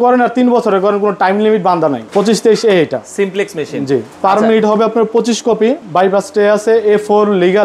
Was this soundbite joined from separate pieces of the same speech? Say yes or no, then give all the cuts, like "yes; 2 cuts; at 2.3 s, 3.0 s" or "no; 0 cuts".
yes; 2 cuts; at 2.1 s, 5.8 s